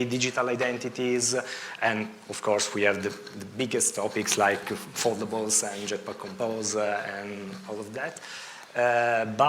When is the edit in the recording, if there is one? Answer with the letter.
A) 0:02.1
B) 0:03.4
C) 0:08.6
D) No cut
D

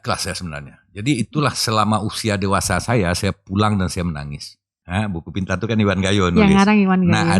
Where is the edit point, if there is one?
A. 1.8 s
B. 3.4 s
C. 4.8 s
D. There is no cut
C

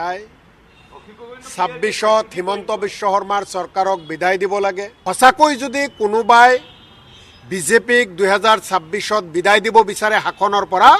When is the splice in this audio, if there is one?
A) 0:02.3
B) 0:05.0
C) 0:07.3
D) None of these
B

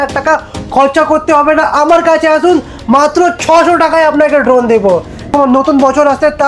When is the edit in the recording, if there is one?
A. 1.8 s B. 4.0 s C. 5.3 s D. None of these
C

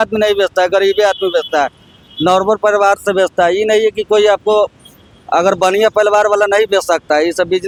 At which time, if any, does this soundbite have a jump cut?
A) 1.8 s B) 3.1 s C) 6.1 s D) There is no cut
D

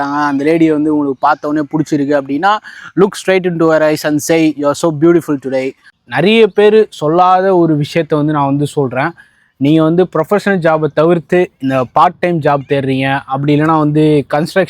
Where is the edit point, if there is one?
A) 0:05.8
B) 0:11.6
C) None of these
A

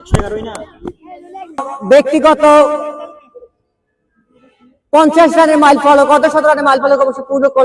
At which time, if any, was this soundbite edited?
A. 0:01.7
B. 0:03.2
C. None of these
A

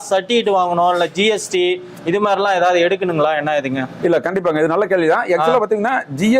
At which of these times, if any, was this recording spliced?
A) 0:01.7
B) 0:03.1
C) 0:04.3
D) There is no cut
D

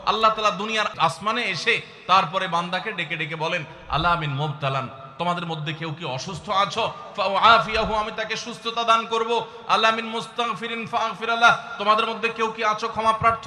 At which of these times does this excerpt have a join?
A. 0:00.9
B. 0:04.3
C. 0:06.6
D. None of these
A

